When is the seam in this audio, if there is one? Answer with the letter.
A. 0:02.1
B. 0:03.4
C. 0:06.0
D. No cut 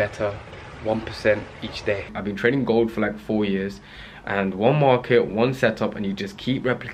A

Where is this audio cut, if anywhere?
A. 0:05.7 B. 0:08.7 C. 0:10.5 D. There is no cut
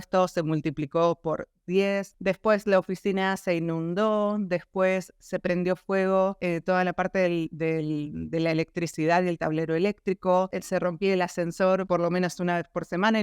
C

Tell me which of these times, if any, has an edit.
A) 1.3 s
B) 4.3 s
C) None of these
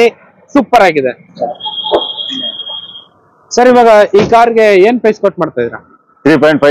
A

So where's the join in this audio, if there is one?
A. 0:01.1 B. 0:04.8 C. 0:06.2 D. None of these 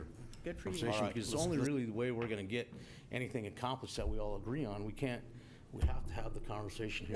A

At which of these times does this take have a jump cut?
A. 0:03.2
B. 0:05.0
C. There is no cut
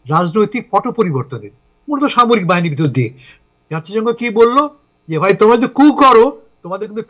A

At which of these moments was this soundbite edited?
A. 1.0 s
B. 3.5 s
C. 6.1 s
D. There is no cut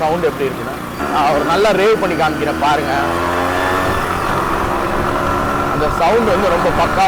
A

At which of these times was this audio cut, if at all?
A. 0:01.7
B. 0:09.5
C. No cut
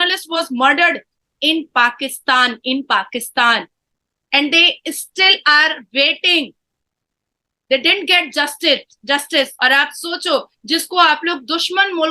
B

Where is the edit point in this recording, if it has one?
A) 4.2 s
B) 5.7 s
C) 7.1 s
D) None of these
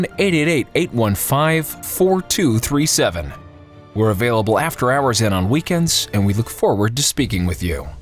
A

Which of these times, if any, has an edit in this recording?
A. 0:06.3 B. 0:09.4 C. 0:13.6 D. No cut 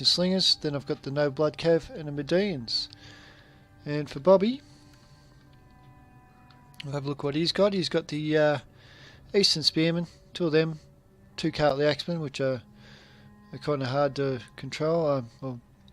C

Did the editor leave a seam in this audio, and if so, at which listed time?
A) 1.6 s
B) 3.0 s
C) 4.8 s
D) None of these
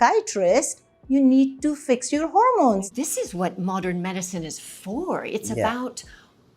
B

